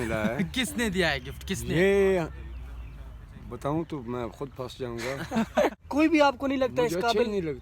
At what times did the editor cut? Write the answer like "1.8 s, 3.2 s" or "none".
5.8 s